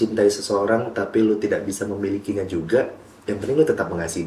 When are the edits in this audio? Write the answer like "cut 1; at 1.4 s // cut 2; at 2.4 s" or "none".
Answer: none